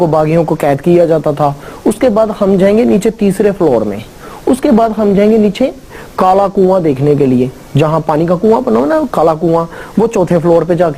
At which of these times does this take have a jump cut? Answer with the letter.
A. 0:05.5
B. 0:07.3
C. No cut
A